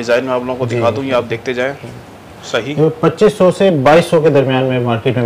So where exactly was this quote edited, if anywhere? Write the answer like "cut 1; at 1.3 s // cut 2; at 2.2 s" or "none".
cut 1; at 2.3 s